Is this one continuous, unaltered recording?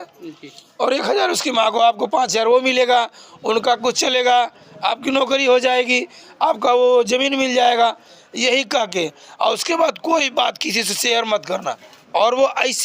no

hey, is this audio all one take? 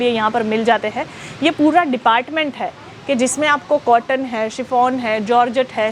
yes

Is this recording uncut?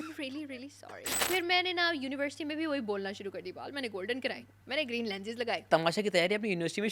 no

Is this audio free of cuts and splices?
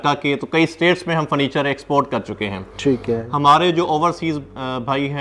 yes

